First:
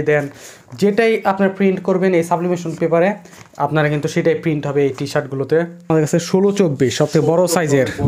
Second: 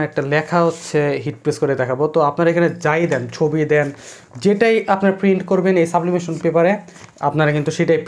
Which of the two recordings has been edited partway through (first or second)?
first